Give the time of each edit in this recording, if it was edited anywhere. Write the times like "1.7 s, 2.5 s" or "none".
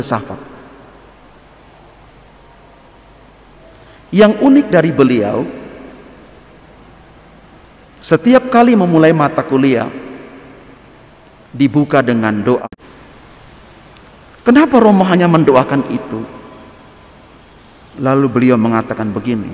12.6 s